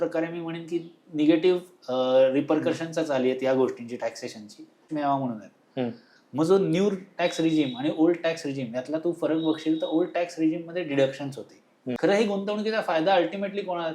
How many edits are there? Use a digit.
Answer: 2